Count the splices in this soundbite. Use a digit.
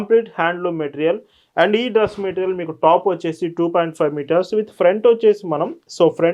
0